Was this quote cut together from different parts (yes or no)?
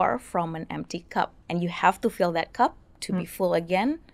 yes